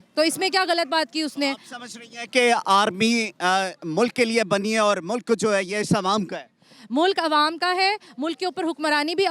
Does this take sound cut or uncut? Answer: uncut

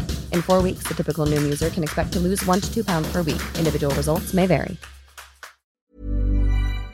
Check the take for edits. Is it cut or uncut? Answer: cut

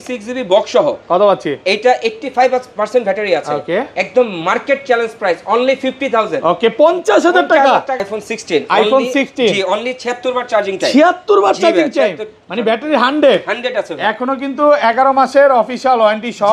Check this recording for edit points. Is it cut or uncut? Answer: cut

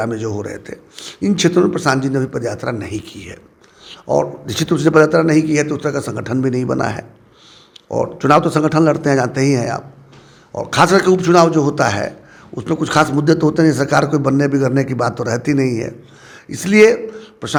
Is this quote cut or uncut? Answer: uncut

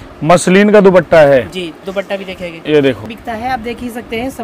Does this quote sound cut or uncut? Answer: cut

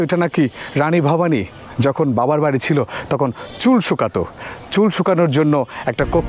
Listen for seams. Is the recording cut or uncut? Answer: uncut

